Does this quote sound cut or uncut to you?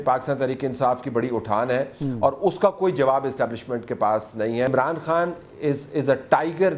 cut